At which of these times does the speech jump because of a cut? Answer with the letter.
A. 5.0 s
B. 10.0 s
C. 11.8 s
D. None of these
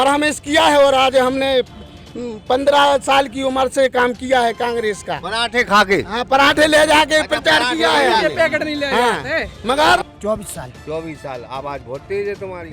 B